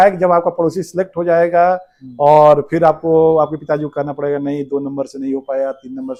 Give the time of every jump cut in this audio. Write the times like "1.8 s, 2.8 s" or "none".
none

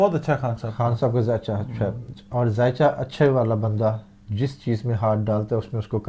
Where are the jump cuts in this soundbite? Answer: none

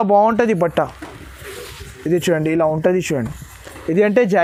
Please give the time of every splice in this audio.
none

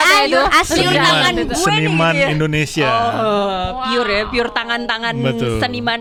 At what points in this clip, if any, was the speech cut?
none

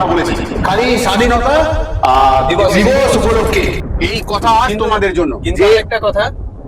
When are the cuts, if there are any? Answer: none

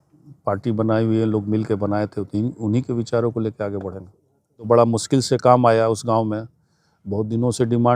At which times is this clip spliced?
4.7 s

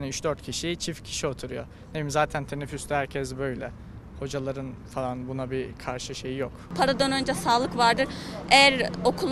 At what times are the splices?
6.6 s

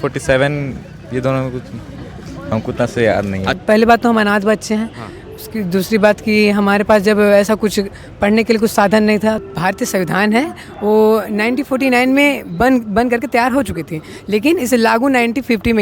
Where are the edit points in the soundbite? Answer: 3.6 s, 9.5 s

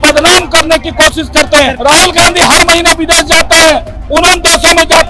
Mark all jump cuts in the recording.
1.8 s

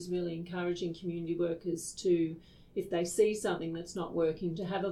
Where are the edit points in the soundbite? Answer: none

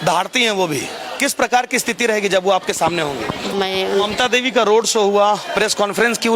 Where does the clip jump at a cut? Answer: 3.5 s

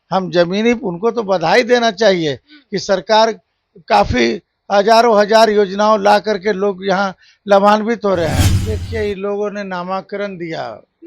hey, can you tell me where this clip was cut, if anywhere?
8.7 s

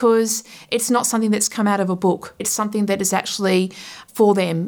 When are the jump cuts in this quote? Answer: 2.5 s

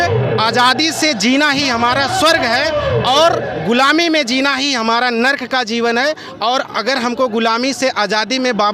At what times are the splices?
none

